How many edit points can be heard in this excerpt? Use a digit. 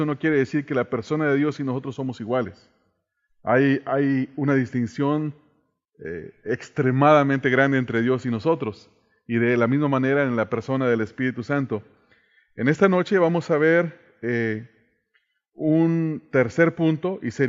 1